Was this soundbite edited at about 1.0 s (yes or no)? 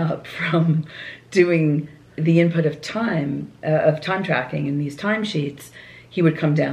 no